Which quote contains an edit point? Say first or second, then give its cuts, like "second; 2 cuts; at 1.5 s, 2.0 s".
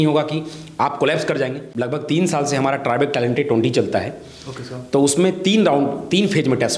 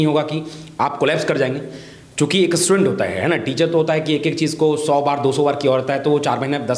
first; 1 cut; at 1.7 s